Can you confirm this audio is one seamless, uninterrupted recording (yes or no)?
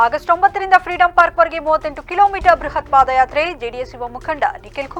yes